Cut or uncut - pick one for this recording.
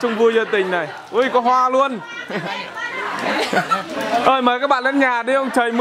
uncut